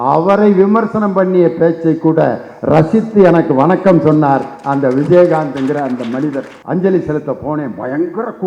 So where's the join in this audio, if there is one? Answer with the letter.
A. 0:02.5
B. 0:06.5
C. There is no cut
B